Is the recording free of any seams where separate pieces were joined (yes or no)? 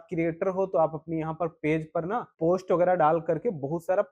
no